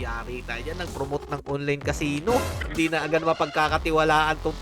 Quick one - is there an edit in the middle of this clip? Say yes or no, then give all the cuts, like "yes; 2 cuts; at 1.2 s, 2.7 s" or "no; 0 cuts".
yes; 1 cut; at 2.6 s